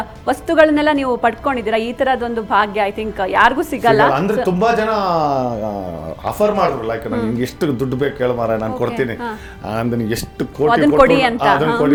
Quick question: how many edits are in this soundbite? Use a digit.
0